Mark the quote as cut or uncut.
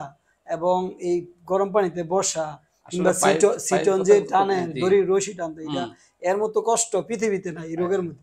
uncut